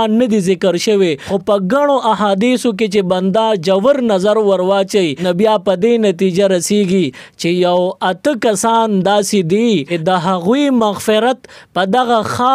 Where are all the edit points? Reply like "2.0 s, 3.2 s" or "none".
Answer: 1.3 s, 5.2 s, 9.9 s